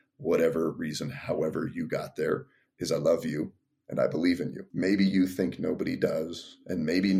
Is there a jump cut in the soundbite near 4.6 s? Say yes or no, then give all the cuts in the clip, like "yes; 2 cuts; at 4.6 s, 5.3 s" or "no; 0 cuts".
yes; 1 cut; at 4.6 s